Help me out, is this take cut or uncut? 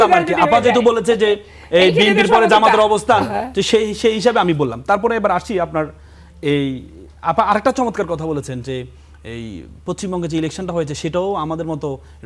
uncut